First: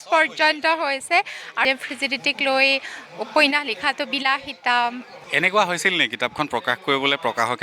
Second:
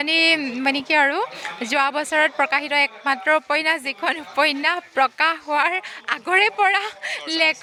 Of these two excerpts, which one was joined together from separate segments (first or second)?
first